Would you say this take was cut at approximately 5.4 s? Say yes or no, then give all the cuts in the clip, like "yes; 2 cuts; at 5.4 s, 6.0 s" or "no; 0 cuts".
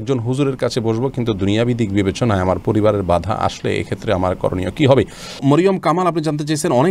yes; 1 cut; at 5.4 s